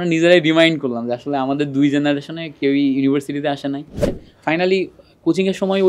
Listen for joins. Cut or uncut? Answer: cut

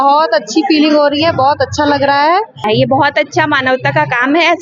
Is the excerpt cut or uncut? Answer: cut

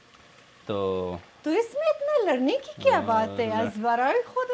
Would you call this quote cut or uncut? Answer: uncut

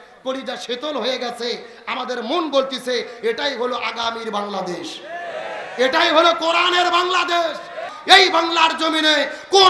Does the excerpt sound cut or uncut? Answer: cut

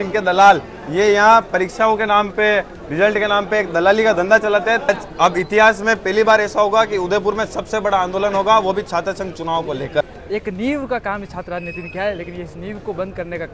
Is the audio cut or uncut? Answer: cut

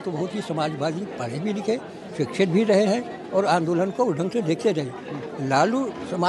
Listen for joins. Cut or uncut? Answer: uncut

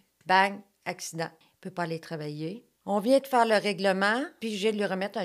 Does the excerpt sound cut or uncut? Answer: cut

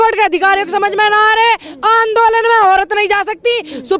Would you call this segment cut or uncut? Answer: uncut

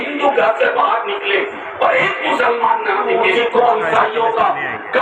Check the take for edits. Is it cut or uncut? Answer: cut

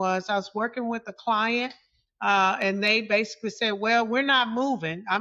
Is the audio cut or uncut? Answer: uncut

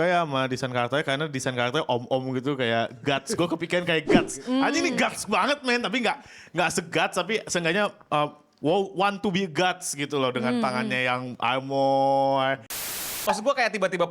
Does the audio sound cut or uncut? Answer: cut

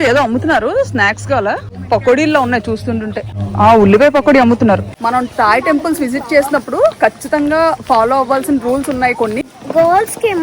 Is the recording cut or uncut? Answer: cut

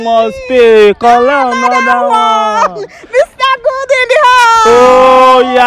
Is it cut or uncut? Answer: uncut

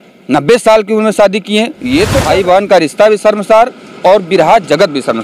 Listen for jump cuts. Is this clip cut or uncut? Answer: cut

